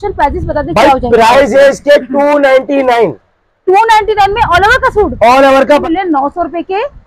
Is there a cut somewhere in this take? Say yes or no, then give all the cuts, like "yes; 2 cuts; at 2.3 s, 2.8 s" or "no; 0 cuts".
yes; 1 cut; at 5.7 s